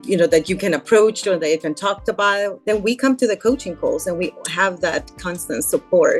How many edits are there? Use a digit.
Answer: 1